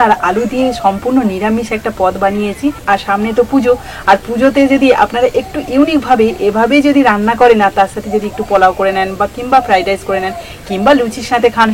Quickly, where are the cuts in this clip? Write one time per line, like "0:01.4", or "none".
none